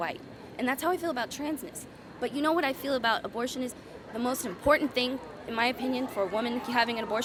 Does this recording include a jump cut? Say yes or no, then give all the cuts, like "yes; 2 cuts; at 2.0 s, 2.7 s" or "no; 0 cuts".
no; 0 cuts